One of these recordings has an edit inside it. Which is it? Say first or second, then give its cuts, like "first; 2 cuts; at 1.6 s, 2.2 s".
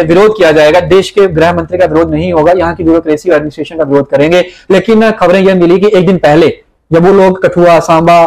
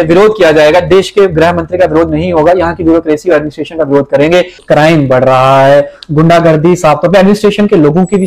second; 1 cut; at 4.6 s